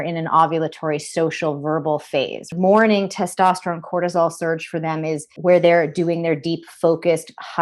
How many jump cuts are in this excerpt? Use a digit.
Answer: 2